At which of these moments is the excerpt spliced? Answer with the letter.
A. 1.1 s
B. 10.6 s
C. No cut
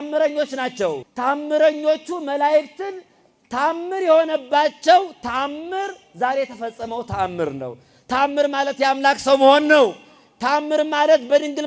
A